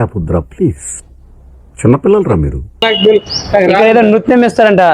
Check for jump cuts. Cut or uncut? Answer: cut